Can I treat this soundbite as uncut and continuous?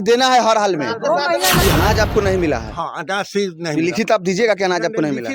no; 1 cut; at 1.6 s

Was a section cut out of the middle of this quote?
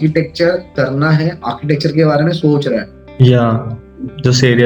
no; 0 cuts

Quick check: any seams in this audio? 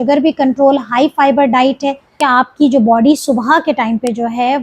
yes; 1 cut; at 2.2 s

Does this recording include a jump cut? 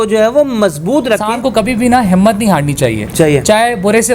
yes; 1 cut; at 1.3 s

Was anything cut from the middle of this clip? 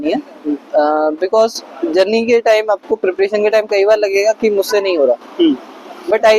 no; 0 cuts

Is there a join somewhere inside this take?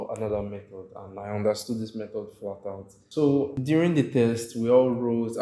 yes; 2 cuts; at 2.9 s, 3.6 s

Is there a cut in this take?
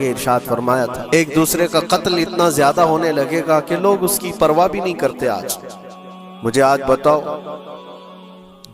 yes; 1 cut; at 1.1 s

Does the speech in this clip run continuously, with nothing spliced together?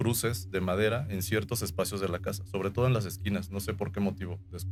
yes; 0 cuts

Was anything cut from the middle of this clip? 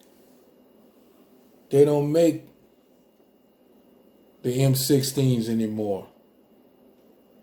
no; 0 cuts

